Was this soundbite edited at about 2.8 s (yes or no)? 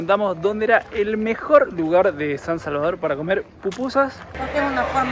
no